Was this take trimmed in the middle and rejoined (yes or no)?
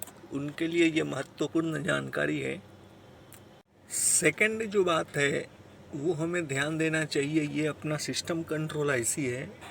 yes